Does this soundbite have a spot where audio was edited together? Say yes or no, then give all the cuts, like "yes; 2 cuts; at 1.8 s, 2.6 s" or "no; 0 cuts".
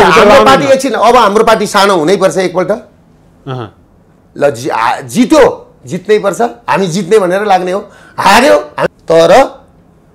yes; 1 cut; at 8.8 s